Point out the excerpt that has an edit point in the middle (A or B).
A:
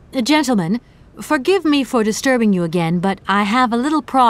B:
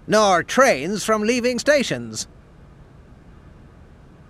B